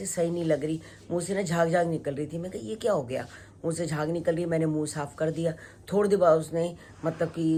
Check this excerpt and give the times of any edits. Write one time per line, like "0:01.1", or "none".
none